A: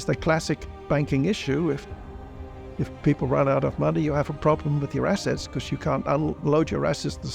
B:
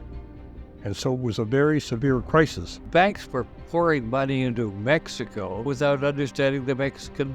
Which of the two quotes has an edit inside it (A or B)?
B